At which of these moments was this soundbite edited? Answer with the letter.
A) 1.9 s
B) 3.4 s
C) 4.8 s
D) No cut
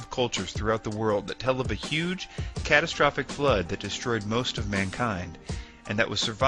B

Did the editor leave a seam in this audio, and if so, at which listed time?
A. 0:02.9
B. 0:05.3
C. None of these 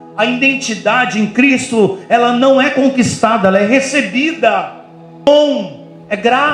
B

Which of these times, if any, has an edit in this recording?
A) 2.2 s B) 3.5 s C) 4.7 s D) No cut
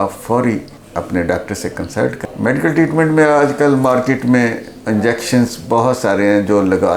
A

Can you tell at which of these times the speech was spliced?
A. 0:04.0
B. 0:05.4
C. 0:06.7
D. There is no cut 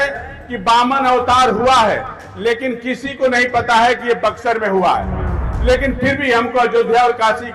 B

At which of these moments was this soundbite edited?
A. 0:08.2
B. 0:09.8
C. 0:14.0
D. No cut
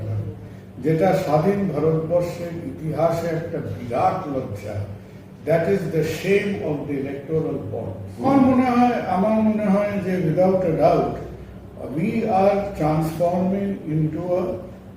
A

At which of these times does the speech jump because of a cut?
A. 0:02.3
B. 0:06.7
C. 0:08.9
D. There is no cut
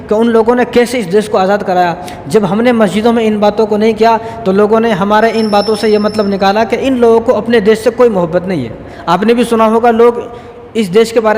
C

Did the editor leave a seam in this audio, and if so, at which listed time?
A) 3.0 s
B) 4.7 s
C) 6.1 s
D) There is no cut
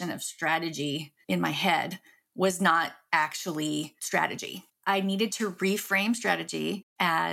B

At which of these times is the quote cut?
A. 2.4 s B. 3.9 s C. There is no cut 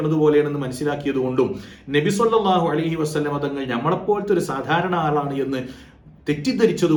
C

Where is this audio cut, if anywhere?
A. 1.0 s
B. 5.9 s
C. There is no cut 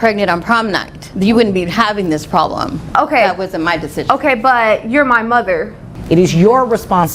B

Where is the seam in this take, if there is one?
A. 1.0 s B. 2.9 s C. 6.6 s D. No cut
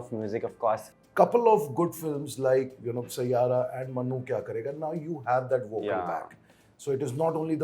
A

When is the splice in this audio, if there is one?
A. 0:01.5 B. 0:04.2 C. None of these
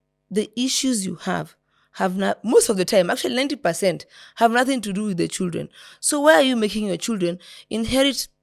C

